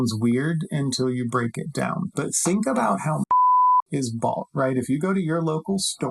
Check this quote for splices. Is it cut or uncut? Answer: cut